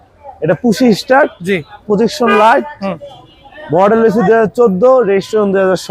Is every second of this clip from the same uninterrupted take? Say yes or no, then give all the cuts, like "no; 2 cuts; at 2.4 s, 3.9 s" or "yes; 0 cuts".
yes; 0 cuts